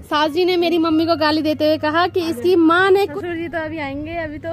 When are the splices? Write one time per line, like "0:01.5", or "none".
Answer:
0:03.1